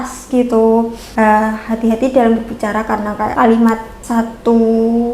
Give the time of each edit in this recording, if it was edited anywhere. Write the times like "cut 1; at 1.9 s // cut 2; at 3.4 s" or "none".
cut 1; at 1.0 s // cut 2; at 3.3 s // cut 3; at 3.9 s